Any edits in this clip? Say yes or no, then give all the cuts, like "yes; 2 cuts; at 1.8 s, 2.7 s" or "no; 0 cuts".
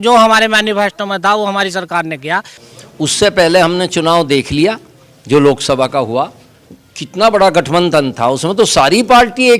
yes; 1 cut; at 2.6 s